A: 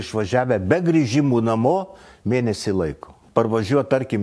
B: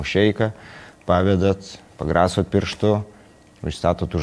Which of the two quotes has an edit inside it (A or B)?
A